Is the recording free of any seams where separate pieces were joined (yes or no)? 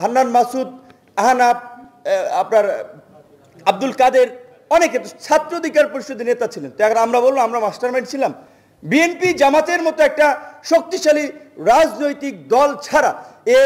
yes